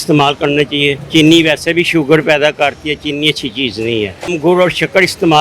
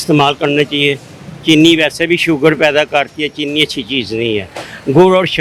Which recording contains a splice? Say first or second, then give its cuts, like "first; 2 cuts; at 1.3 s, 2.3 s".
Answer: first; 2 cuts; at 1.0 s, 4.3 s